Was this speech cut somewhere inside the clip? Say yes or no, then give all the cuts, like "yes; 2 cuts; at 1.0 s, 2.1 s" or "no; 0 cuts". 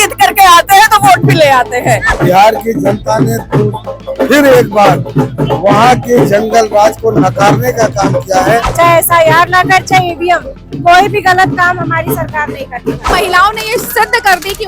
yes; 3 cuts; at 2.1 s, 8.7 s, 13.1 s